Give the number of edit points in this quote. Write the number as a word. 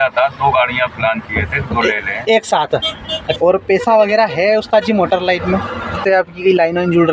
two